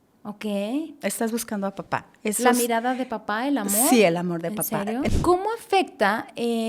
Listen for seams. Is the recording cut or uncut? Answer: cut